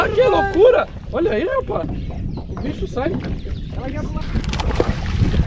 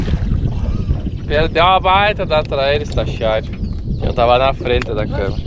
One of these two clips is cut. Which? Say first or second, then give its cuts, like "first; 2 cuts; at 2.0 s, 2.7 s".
first; 1 cut; at 4.3 s